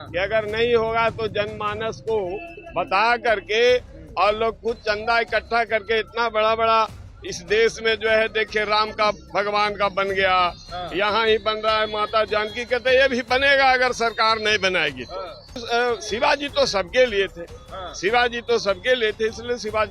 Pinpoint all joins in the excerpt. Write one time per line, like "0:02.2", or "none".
0:15.6

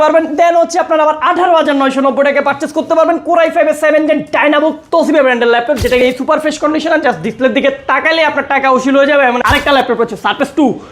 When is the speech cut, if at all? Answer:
0:06.0
0:09.4

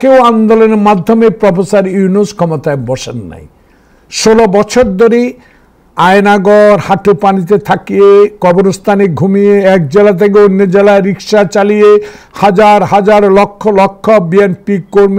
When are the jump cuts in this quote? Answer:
none

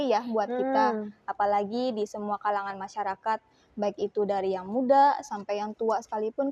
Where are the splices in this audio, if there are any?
none

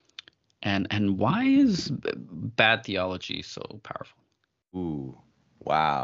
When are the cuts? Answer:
0:04.8

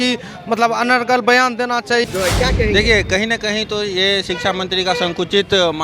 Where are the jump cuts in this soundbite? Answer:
0:02.0

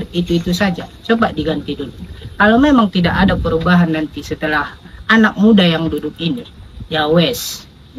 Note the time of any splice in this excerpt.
none

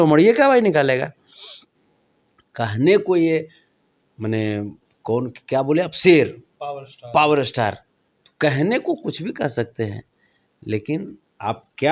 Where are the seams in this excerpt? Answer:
none

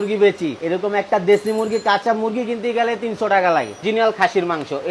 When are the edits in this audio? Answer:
0:03.8

